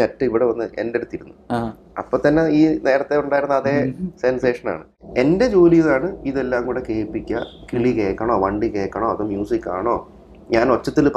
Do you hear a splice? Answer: yes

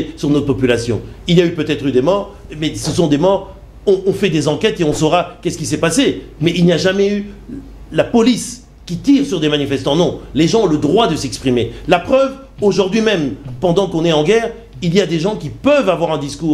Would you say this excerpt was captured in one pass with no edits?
yes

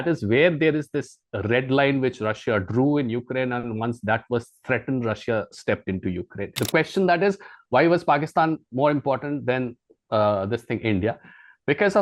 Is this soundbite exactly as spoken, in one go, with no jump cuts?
no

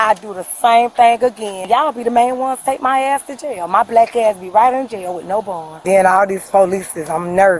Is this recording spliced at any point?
yes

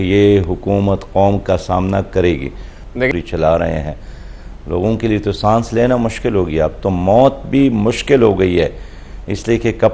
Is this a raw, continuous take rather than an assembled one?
no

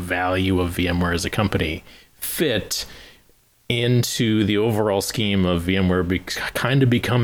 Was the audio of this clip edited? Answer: no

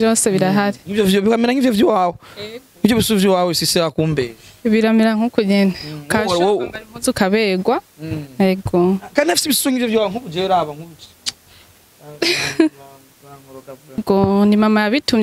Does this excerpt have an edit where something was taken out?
yes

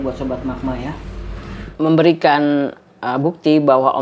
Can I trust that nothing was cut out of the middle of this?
no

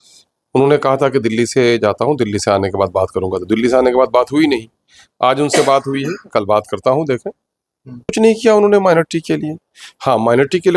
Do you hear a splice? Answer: yes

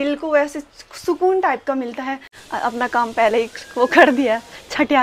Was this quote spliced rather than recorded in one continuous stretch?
yes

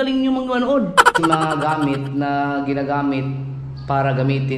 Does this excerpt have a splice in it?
yes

